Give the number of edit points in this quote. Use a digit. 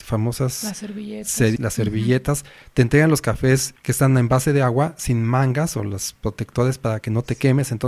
2